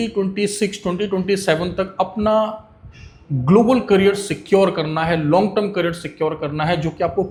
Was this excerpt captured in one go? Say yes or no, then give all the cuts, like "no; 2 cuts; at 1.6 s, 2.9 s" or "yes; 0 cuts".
yes; 0 cuts